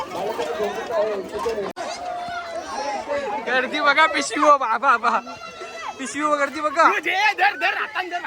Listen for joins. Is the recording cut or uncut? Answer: cut